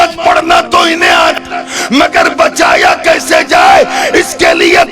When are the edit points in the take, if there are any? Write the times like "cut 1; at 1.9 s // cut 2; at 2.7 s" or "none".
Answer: cut 1; at 1.4 s